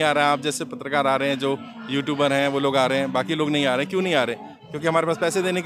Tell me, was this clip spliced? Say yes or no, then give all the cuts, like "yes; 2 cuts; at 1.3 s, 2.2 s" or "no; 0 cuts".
no; 0 cuts